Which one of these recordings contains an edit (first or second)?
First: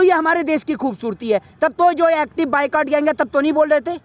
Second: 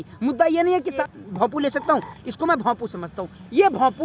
second